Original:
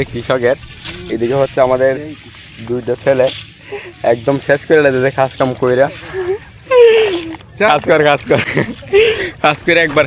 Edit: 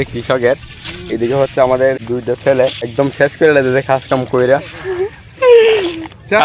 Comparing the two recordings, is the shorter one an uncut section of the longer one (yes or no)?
no